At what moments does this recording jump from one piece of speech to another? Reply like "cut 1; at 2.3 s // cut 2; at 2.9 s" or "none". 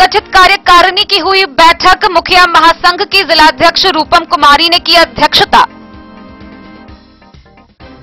none